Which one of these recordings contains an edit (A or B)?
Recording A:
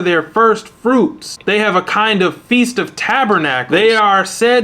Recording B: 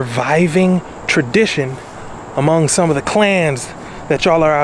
A